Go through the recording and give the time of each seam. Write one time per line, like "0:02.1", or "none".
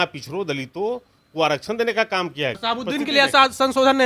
0:02.6